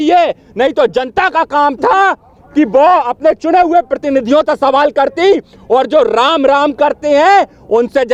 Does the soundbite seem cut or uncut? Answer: uncut